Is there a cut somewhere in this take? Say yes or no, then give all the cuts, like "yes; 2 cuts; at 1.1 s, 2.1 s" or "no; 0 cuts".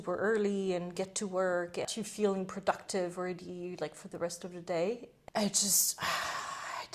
yes; 2 cuts; at 1.9 s, 5.1 s